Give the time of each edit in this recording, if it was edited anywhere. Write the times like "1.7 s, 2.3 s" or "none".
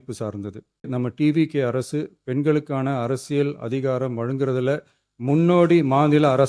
0.9 s

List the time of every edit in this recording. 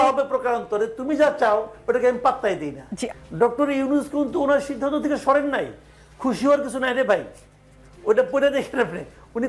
3.0 s

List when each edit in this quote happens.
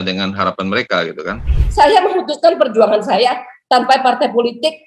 1.5 s

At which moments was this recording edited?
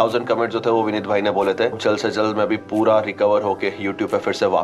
1.8 s

